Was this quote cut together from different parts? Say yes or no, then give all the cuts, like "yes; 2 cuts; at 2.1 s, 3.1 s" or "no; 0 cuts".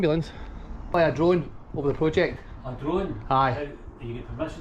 yes; 1 cut; at 0.9 s